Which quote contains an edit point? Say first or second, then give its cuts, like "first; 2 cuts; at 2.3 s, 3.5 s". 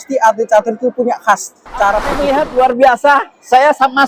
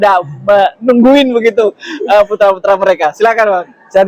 first; 1 cut; at 2.2 s